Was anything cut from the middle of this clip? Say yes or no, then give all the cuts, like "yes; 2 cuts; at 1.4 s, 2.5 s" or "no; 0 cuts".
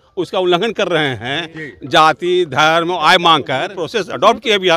yes; 1 cut; at 3.8 s